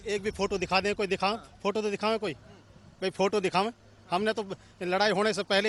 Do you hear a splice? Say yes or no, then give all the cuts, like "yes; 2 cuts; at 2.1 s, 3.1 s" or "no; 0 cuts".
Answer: no; 0 cuts